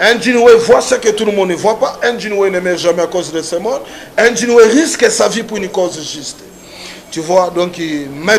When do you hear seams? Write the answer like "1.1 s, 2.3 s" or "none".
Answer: none